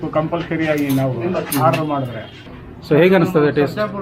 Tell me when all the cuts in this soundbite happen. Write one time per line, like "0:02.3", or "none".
0:02.6